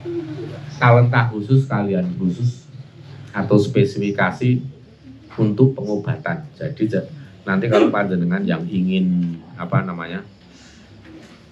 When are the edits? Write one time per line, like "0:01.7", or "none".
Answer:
none